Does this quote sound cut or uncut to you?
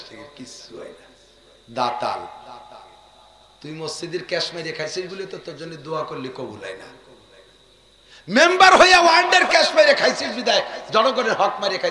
uncut